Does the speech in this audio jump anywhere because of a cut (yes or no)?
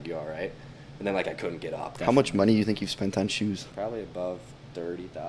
yes